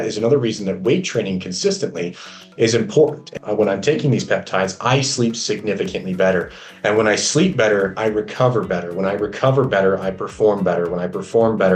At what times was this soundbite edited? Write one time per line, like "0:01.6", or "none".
0:03.3